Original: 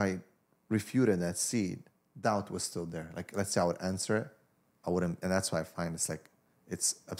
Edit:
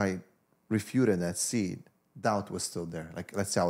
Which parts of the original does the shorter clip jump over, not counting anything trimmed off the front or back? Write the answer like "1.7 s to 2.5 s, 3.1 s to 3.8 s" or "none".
none